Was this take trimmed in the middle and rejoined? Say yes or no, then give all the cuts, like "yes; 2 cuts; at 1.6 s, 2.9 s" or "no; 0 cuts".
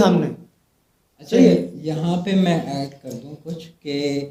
no; 0 cuts